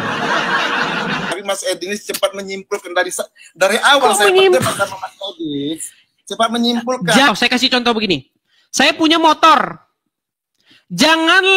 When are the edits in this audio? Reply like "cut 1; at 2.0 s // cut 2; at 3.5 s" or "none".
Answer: cut 1; at 1.4 s // cut 2; at 7.3 s